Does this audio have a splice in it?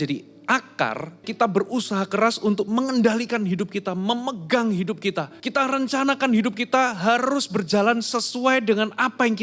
yes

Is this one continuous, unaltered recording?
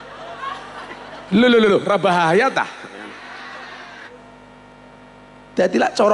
no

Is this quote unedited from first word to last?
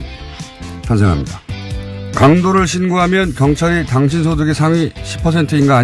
yes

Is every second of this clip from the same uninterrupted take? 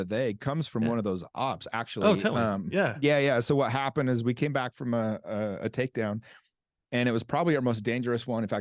yes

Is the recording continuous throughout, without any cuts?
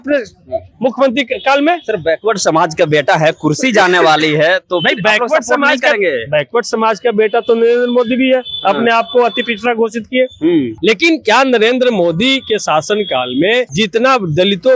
no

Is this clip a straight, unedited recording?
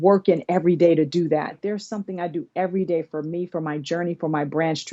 no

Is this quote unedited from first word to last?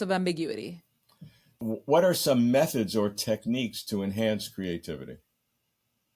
no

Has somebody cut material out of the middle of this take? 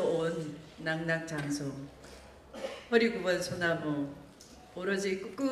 yes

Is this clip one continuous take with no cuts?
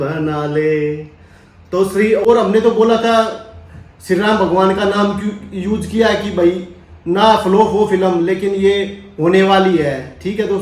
no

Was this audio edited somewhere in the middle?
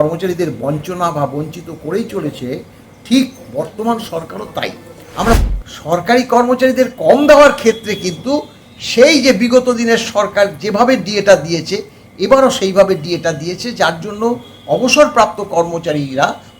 yes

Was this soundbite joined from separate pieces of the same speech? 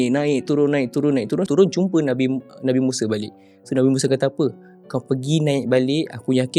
yes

